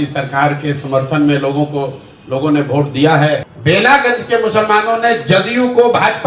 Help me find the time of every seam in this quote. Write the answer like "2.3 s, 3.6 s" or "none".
3.5 s